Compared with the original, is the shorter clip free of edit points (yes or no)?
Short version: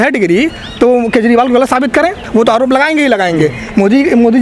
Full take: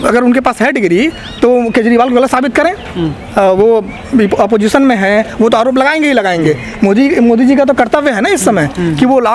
no